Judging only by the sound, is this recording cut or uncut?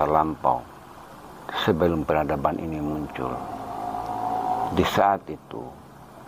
cut